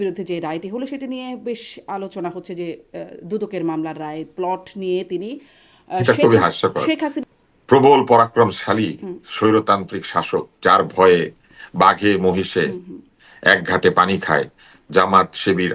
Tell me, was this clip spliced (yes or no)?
yes